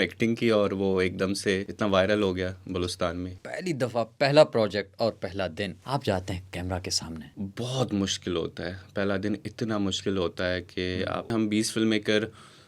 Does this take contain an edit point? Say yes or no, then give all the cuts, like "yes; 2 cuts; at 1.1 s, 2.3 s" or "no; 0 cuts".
yes; 5 cuts; at 1.7 s, 3.4 s, 5.8 s, 7.3 s, 11.3 s